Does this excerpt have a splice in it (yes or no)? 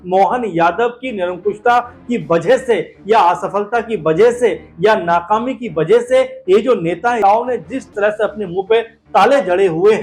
yes